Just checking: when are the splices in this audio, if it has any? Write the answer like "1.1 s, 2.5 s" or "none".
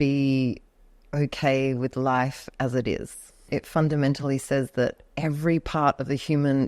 3.5 s, 5.1 s